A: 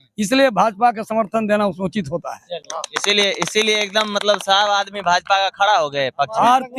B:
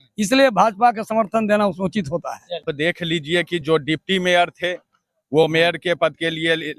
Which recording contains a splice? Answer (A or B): B